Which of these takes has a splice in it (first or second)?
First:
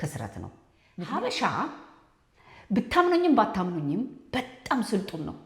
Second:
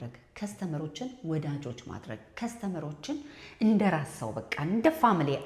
first